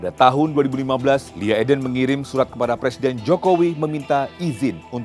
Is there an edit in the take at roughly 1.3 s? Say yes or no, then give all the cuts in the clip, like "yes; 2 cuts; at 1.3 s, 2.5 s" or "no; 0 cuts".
yes; 1 cut; at 1.3 s